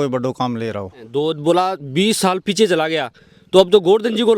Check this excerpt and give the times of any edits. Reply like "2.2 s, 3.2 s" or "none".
1.1 s